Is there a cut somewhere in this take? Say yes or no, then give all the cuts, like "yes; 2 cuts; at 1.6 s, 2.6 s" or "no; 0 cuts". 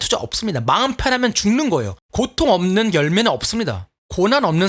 yes; 1 cut; at 2.0 s